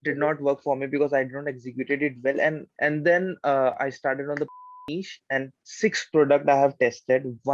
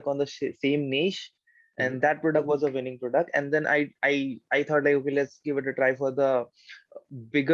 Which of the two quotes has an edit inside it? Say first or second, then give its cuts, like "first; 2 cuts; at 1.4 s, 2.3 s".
first; 1 cut; at 2.7 s